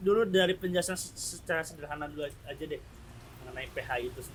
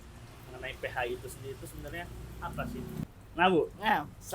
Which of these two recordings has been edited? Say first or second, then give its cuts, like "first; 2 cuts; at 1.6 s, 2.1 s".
second; 1 cut; at 3.0 s